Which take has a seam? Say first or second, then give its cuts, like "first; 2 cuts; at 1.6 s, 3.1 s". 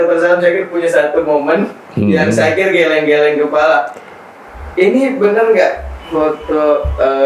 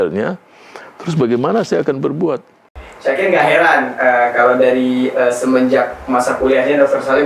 second; 1 cut; at 2.8 s